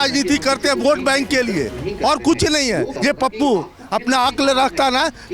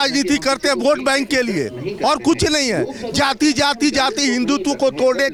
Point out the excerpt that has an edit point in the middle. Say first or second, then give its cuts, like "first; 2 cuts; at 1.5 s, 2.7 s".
first; 1 cut; at 2.9 s